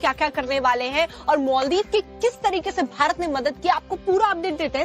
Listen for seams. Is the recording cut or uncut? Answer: cut